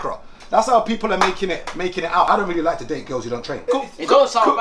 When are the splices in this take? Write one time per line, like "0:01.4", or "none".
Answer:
0:02.3
0:03.5